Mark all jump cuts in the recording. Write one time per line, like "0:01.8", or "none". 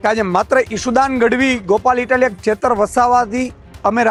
none